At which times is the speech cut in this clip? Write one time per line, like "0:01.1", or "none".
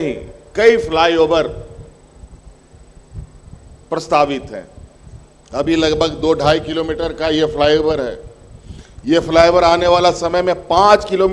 none